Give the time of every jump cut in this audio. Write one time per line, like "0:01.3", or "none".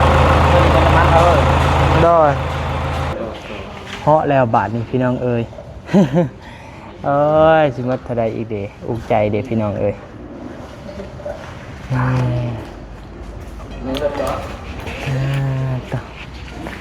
0:03.1